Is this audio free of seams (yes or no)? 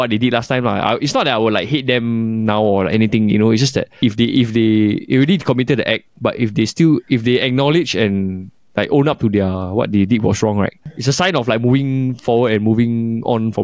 no